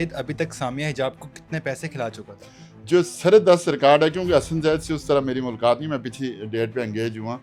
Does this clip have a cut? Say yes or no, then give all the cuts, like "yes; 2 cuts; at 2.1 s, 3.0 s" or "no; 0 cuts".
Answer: no; 0 cuts